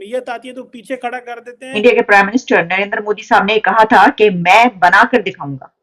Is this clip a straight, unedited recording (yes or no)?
no